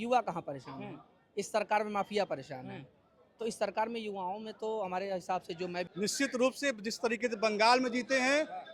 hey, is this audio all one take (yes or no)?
no